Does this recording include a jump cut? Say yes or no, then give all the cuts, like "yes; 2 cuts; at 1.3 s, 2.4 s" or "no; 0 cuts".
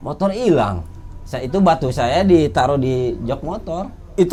no; 0 cuts